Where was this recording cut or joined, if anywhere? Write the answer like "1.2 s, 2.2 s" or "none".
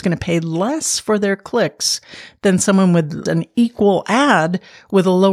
3.2 s